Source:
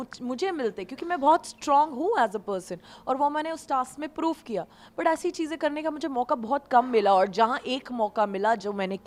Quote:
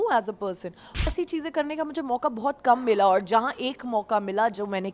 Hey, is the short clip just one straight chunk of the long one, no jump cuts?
no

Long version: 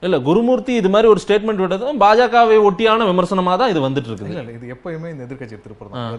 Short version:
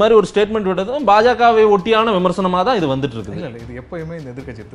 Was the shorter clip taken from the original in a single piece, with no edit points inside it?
yes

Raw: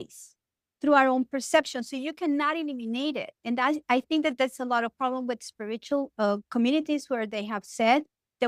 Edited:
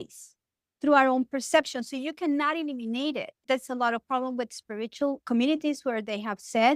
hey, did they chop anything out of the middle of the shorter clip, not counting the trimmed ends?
yes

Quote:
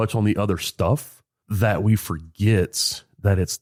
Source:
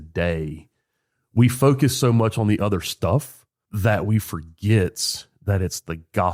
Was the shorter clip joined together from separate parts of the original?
no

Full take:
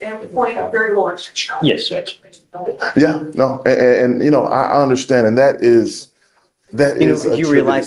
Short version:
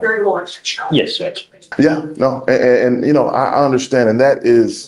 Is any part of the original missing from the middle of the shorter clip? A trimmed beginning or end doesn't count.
yes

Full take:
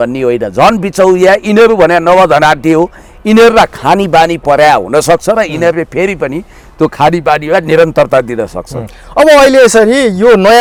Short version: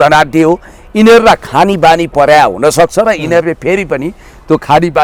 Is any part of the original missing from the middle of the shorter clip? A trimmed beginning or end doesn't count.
no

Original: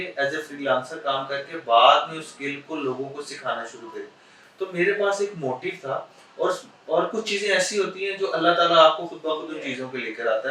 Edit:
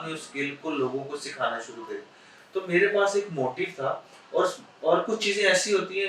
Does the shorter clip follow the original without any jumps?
yes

